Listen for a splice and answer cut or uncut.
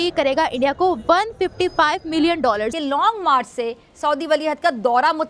cut